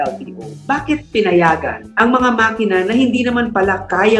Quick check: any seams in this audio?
yes; 1 cut; at 1.8 s

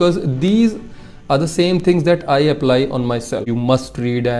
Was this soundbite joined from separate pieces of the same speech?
yes; 1 cut; at 3.4 s

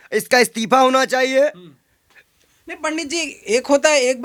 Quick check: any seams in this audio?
no; 0 cuts

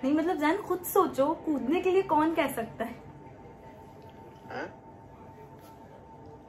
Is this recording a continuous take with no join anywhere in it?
yes; 0 cuts

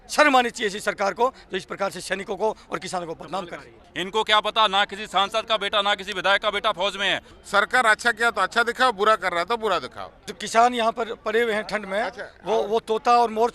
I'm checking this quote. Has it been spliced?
yes; 3 cuts; at 3.9 s, 7.3 s, 10.4 s

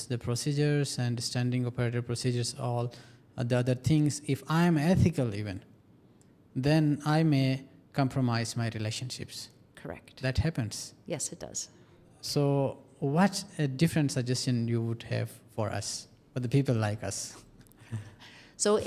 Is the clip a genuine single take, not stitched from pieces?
yes; 0 cuts

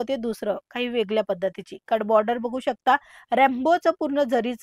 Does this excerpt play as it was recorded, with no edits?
yes; 0 cuts

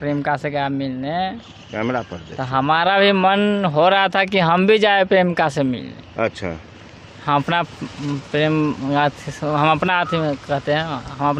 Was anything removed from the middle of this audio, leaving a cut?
no; 0 cuts

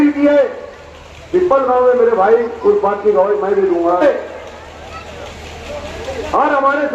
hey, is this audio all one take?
no; 1 cut; at 4.0 s

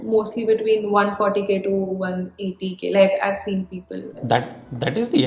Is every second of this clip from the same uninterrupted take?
no; 1 cut; at 4.1 s

